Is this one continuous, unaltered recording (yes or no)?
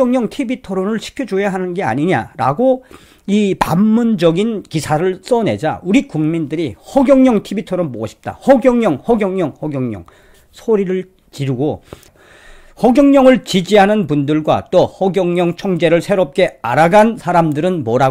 no